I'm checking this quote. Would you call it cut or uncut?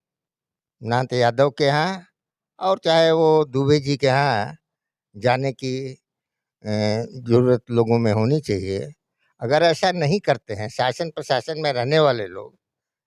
uncut